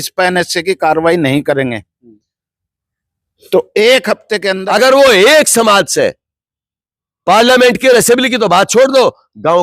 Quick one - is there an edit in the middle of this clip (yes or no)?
yes